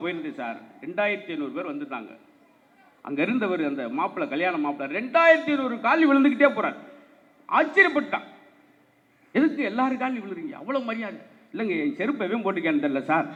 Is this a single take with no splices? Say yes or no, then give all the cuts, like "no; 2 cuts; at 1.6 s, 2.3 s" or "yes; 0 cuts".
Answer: yes; 0 cuts